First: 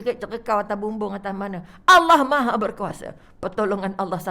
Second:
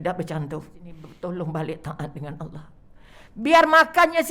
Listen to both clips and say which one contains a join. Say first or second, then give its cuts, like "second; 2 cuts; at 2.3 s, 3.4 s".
second; 1 cut; at 1.0 s